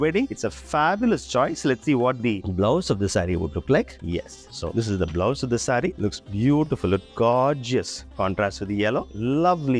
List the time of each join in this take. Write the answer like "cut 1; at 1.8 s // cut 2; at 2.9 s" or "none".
none

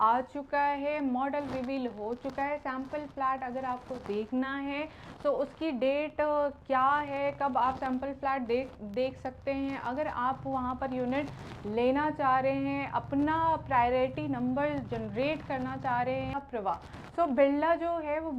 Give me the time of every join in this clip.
cut 1; at 16.4 s

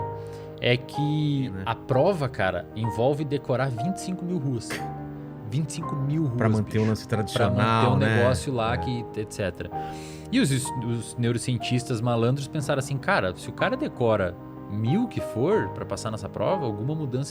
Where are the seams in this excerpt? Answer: cut 1; at 1.7 s

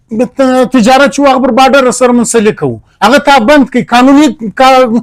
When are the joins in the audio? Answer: none

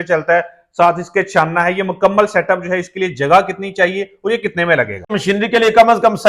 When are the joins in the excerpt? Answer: cut 1; at 5.1 s

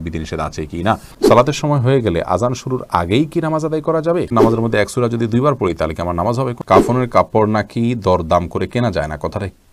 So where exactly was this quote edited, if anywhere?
cut 1; at 1.1 s // cut 2; at 4.3 s // cut 3; at 6.6 s

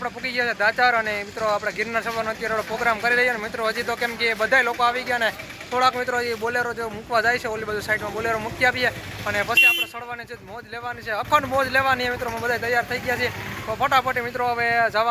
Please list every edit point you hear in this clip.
none

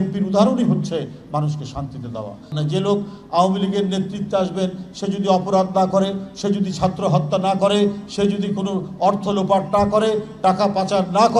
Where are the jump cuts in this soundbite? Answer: cut 1; at 2.5 s

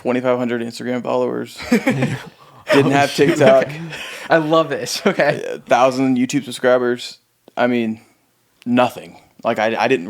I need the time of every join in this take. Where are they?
none

